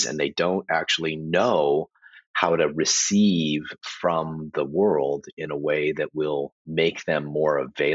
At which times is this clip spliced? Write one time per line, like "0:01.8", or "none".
0:06.6